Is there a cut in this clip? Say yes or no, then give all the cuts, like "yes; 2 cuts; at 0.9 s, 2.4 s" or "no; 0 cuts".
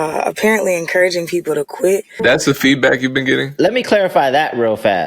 yes; 2 cuts; at 2.2 s, 3.5 s